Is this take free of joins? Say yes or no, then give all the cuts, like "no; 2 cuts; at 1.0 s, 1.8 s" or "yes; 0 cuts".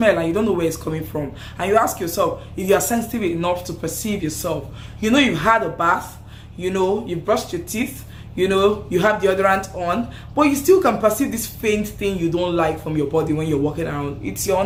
yes; 0 cuts